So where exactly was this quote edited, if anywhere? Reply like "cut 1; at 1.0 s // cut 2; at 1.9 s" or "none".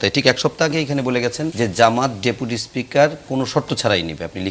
cut 1; at 1.5 s